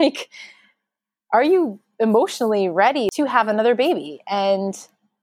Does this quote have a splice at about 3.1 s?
yes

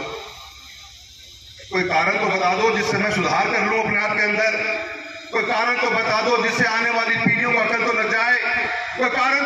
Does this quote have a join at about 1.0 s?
no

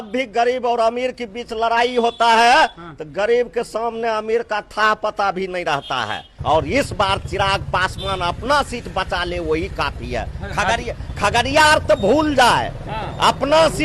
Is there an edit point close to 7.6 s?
no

